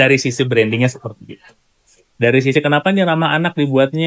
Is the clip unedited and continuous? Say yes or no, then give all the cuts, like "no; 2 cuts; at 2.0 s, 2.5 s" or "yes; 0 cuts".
yes; 0 cuts